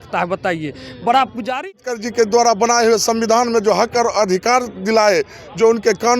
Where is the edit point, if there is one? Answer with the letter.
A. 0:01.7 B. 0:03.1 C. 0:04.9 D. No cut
A